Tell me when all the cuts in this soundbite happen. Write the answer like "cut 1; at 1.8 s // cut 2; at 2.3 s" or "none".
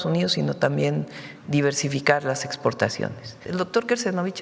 cut 1; at 3.4 s